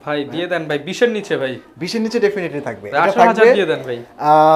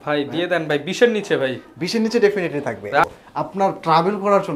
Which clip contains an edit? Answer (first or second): second